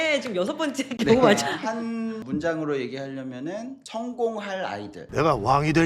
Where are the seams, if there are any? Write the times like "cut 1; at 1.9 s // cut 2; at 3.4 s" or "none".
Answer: cut 1; at 5.0 s